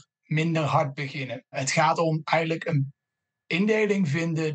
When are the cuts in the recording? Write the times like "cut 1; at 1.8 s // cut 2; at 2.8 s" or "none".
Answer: cut 1; at 1.6 s